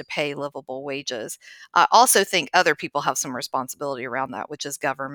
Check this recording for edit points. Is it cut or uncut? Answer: uncut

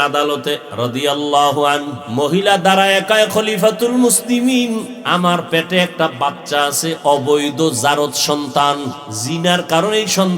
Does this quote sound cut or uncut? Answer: cut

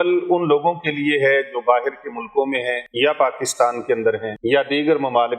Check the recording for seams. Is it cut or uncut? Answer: cut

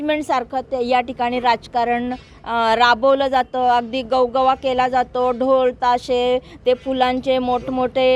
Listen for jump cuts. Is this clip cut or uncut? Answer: uncut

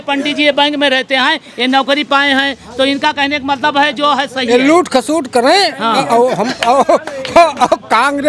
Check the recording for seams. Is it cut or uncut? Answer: uncut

